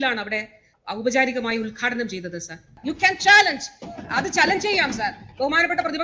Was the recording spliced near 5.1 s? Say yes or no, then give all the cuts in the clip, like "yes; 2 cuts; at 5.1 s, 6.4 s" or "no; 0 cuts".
no; 1 cut; at 2.8 s